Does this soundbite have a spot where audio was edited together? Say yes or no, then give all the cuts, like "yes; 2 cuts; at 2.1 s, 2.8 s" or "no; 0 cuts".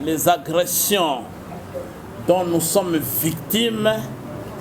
no; 0 cuts